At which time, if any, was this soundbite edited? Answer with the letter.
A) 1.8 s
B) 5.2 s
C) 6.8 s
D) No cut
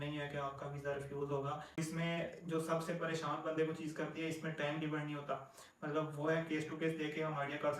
A